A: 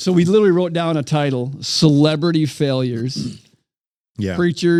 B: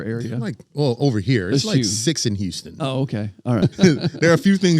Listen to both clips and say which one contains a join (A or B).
B